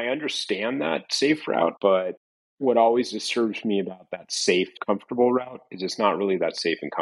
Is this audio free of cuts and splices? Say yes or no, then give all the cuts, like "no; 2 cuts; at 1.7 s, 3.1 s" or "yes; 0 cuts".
no; 1 cut; at 2.0 s